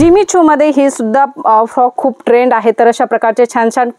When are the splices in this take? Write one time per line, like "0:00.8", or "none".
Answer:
none